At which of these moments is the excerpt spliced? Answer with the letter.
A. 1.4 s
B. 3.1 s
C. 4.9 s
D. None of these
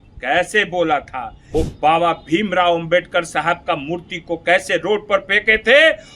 A